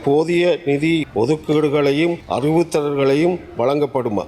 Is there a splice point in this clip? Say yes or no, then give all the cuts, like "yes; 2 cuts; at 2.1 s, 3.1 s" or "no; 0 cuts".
yes; 2 cuts; at 1.1 s, 2.2 s